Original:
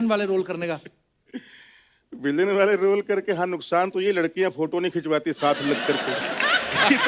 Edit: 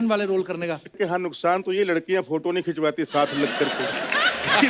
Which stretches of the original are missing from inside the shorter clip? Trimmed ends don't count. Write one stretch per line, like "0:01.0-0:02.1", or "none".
0:01.0-0:03.2